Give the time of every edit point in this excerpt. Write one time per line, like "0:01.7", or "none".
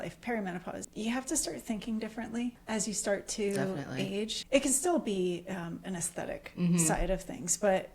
0:00.8
0:02.6
0:04.4